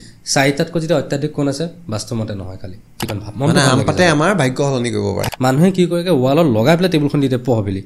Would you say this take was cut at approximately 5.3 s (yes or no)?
yes